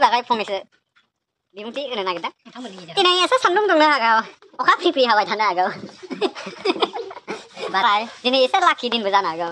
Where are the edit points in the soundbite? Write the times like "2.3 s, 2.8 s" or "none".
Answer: 7.8 s